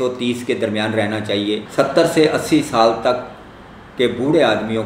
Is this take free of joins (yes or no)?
no